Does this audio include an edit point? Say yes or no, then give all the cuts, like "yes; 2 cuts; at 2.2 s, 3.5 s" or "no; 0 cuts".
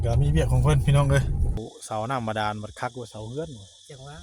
yes; 1 cut; at 1.6 s